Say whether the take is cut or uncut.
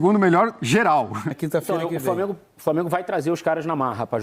cut